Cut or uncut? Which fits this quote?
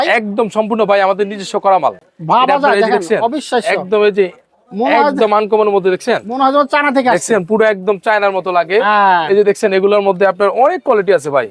uncut